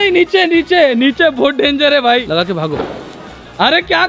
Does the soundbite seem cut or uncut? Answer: cut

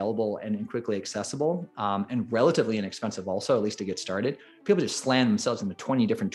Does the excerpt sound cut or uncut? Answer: uncut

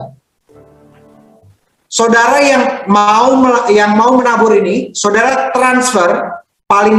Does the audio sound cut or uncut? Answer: uncut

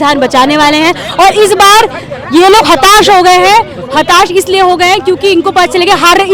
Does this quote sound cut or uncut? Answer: uncut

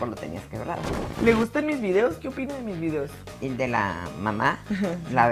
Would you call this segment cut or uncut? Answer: cut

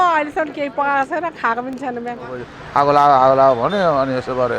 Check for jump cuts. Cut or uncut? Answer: cut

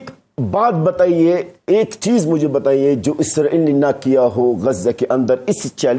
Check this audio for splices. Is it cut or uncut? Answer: uncut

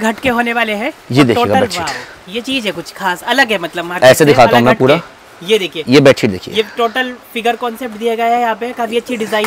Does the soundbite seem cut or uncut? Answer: uncut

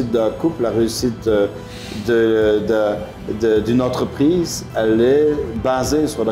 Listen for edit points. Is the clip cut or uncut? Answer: uncut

